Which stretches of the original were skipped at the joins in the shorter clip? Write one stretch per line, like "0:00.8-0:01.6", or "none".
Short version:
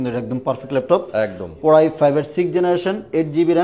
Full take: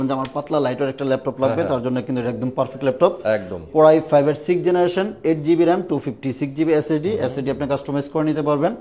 none